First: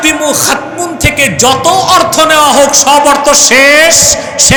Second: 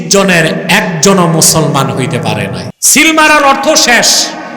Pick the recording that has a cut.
second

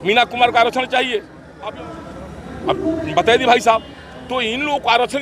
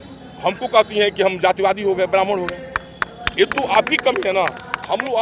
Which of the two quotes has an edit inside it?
first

